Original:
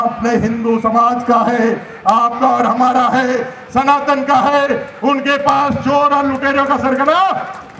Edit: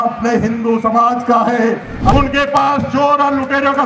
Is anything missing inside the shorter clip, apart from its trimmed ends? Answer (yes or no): yes